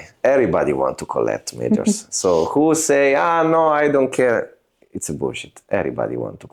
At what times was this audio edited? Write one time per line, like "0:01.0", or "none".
none